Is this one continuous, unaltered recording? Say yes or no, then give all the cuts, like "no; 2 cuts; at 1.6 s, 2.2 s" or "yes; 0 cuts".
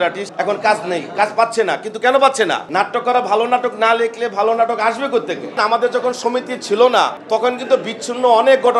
no; 2 cuts; at 2.7 s, 5.6 s